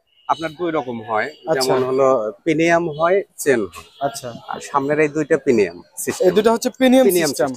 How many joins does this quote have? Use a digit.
0